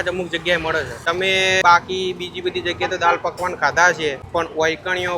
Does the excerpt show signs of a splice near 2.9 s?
no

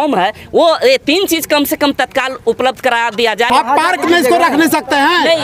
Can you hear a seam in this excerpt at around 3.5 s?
yes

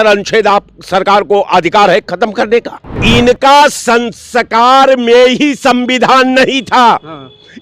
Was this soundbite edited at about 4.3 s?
no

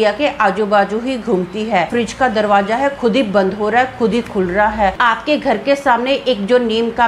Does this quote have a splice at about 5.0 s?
yes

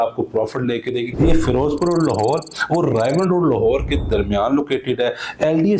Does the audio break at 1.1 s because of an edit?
yes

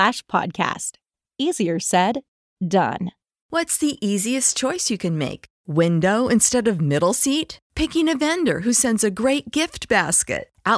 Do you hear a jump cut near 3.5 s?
yes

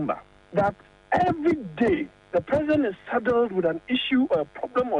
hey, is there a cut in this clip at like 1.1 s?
no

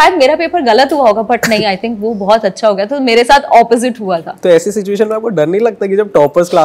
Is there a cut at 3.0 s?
no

